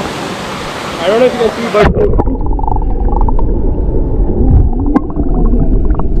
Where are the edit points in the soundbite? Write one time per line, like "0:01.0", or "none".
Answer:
none